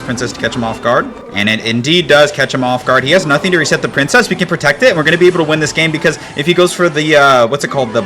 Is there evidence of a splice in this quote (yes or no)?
yes